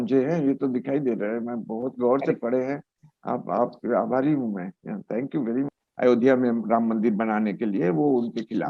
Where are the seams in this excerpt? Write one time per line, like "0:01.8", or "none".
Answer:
0:05.7